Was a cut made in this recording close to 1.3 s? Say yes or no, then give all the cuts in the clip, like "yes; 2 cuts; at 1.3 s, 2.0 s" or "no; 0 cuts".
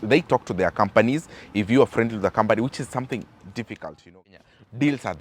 no; 1 cut; at 4.2 s